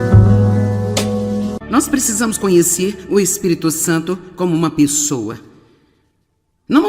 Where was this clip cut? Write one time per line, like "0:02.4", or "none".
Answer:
0:01.6